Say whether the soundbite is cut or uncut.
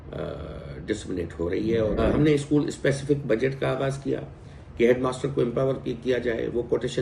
cut